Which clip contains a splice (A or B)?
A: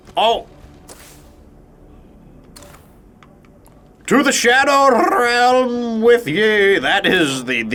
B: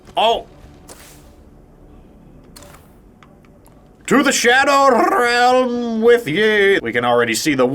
B